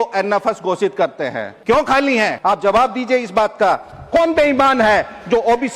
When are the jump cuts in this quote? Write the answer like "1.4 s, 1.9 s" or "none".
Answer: 1.5 s, 2.4 s